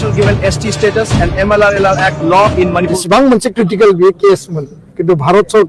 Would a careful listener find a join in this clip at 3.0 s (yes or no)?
yes